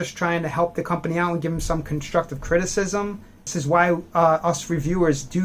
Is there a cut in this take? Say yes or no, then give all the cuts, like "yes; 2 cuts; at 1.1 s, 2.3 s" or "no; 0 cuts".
yes; 1 cut; at 3.5 s